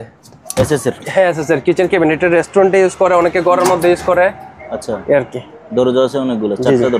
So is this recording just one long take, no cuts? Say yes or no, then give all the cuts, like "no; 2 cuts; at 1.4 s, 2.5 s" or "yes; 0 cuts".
yes; 0 cuts